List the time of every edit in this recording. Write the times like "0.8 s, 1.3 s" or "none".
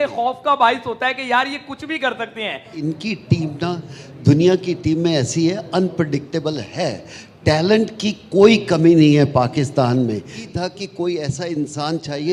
2.7 s, 10.5 s